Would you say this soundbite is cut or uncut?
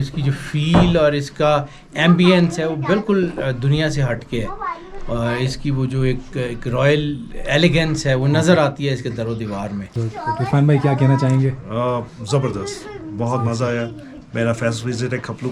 cut